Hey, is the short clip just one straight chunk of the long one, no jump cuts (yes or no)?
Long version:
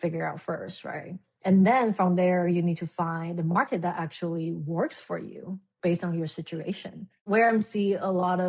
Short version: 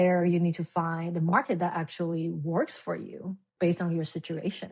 yes